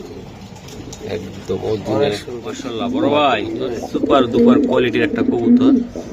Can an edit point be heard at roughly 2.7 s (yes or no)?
yes